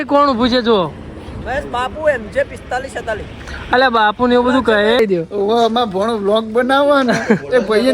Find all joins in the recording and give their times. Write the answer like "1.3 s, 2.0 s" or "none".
5.0 s